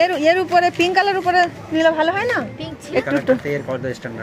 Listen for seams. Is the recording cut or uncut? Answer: cut